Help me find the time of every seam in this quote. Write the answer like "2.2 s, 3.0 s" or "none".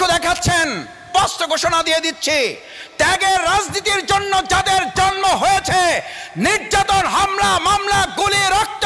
1.1 s